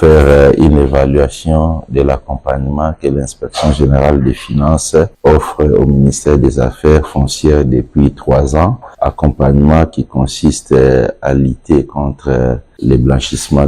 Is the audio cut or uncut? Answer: uncut